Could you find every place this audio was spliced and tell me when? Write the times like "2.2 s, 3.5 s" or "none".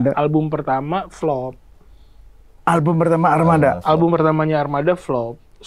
none